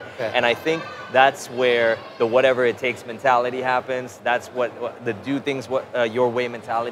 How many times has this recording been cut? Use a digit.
0